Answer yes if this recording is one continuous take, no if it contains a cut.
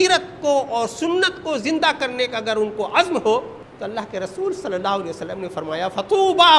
no